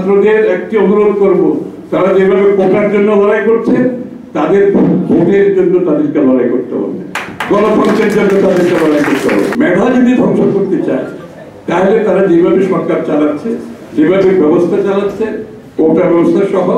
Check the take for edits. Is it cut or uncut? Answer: cut